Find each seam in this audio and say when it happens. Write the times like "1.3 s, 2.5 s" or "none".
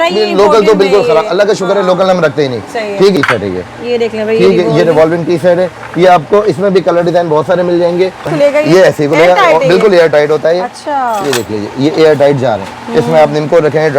3.1 s, 8.3 s

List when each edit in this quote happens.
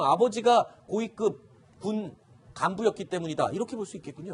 1.8 s

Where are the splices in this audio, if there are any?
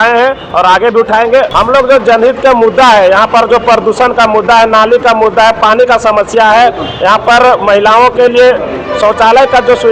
1.5 s

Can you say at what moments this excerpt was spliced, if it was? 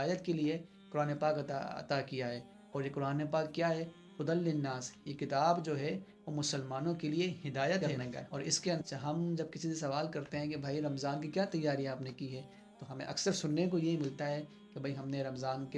8.8 s

